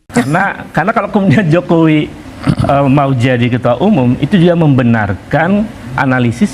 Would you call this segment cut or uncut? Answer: uncut